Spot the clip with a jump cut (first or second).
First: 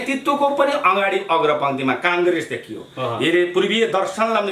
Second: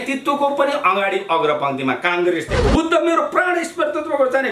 second